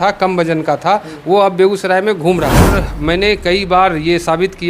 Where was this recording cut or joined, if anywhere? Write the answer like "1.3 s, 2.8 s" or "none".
2.7 s